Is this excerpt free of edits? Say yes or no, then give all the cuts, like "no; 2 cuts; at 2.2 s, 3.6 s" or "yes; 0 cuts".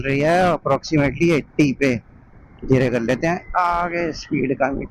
yes; 0 cuts